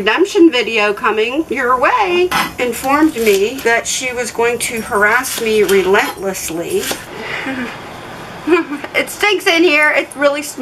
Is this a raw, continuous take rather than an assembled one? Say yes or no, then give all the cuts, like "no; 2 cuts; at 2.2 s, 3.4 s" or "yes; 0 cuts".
no; 3 cuts; at 2.3 s, 3.6 s, 7.0 s